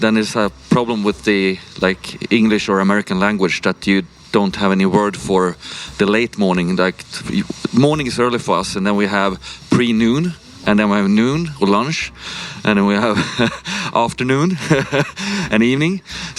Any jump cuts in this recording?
no; 0 cuts

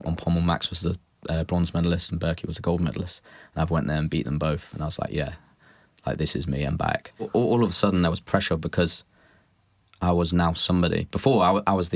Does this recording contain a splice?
yes; 1 cut; at 7.3 s

